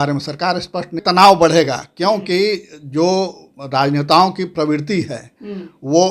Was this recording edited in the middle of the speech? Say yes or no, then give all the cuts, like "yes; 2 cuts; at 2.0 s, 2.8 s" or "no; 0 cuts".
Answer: yes; 1 cut; at 1.0 s